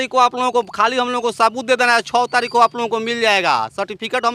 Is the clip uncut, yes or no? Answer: yes